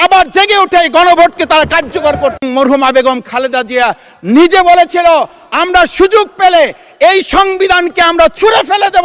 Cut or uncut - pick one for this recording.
cut